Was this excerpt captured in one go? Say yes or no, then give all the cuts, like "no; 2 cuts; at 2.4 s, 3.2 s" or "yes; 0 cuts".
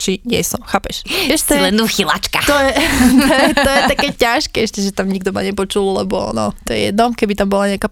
yes; 0 cuts